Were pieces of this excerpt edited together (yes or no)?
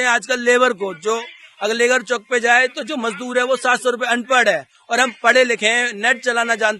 no